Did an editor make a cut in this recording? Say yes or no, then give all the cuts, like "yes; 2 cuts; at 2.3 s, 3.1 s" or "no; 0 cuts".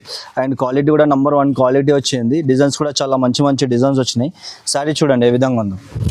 no; 0 cuts